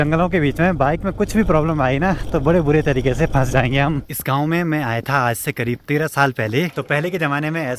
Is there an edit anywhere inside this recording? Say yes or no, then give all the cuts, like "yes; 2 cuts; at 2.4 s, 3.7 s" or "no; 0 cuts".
yes; 2 cuts; at 4.1 s, 6.8 s